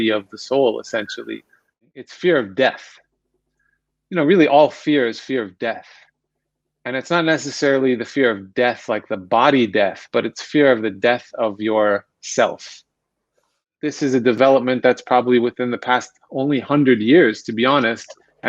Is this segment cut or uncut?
cut